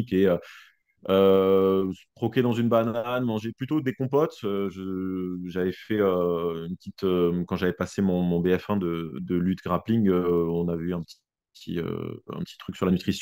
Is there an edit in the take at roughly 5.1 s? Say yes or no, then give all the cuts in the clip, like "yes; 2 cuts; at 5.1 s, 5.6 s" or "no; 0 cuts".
no; 0 cuts